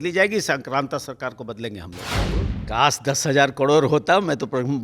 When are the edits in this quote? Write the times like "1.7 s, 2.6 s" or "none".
2.1 s